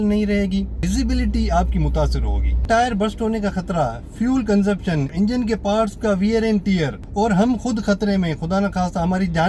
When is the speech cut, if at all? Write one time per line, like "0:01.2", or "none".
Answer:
0:00.8
0:02.6
0:05.1
0:07.0